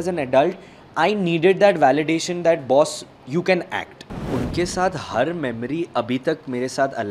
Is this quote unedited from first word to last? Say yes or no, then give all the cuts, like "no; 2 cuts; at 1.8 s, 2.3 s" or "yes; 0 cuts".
no; 1 cut; at 4.3 s